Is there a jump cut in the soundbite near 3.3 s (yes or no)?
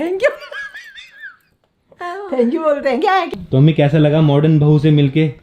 yes